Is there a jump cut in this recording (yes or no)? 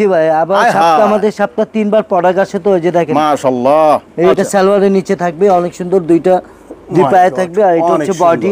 yes